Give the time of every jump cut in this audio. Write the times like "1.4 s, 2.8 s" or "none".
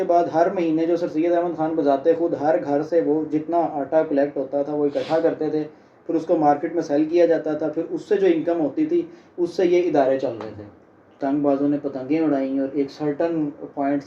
11.2 s

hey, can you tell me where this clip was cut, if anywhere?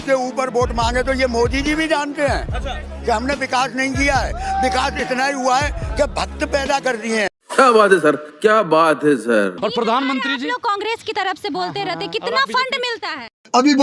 7.4 s, 9.6 s

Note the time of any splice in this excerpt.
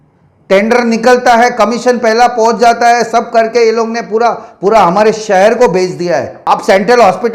6.3 s

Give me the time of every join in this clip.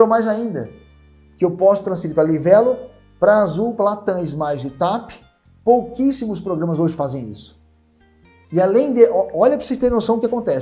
none

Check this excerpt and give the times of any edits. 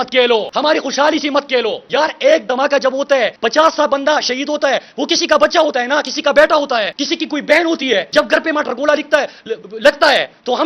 none

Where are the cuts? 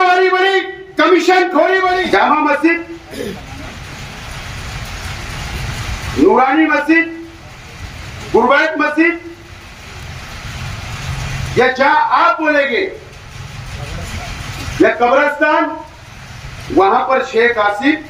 2.1 s

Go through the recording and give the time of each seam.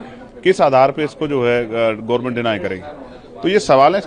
none

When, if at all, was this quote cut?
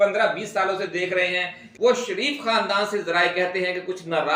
1.6 s

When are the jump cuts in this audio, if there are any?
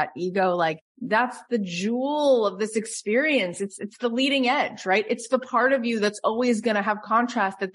0.9 s

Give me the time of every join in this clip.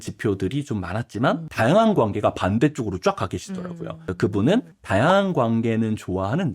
1.5 s

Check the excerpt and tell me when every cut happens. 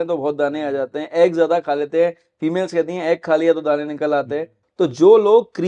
4.6 s

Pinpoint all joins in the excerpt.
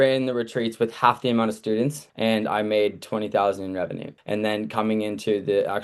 2.0 s, 4.1 s

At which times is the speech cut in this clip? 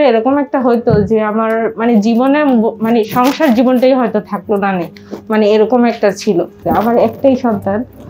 6.5 s

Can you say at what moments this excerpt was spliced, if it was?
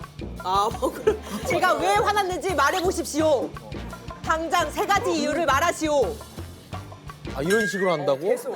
1.5 s

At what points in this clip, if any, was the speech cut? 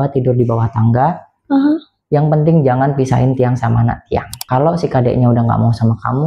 4.3 s

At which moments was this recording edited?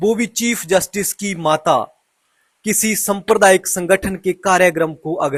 none

